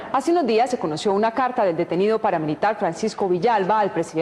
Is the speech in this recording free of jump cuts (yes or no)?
yes